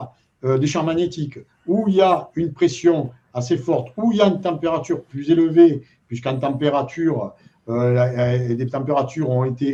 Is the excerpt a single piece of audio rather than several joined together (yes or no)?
yes